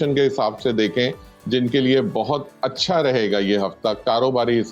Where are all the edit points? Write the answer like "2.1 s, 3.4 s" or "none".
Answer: none